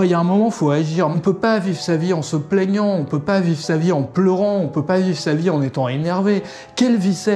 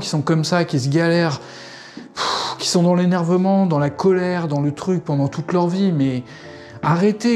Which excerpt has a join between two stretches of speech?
first; 1 cut; at 1.1 s

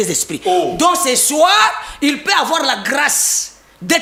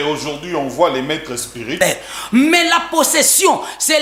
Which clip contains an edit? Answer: second; 1 cut; at 1.8 s

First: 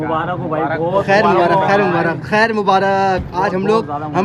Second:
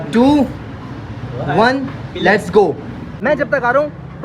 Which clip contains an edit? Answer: second; 1 cut; at 3.0 s

